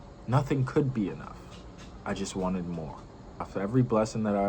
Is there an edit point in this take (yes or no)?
yes